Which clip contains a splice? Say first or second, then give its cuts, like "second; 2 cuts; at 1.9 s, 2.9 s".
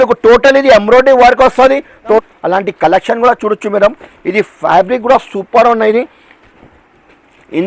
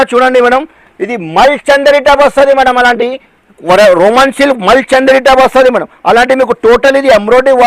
first; 1 cut; at 2.2 s